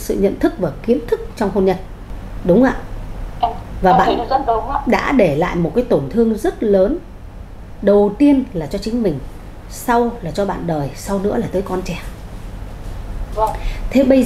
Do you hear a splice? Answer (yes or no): no